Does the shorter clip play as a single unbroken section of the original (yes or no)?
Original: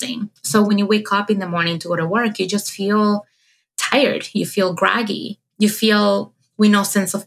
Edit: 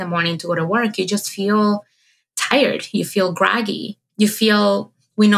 yes